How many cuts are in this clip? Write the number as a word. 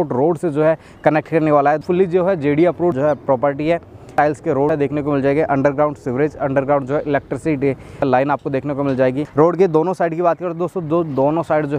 five